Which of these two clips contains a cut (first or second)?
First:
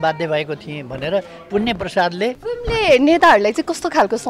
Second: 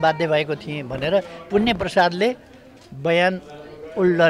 first